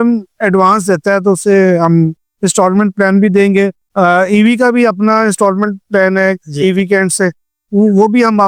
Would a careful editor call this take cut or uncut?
uncut